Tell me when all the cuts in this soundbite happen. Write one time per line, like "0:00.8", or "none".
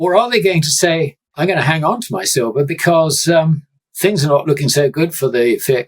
0:01.2